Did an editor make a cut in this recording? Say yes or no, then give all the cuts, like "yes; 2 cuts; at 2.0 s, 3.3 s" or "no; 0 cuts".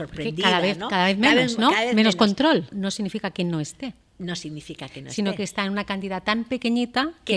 yes; 1 cut; at 2.7 s